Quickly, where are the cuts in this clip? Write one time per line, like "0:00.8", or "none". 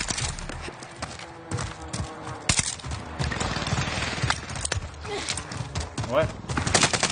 none